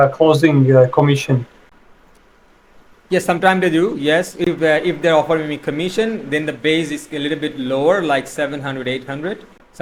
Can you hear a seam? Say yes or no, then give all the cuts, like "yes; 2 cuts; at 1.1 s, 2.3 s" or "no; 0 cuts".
no; 0 cuts